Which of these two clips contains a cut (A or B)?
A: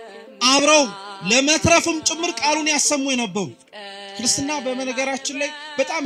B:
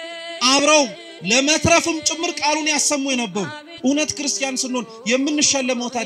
B